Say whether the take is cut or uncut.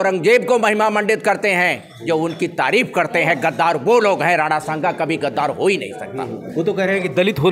uncut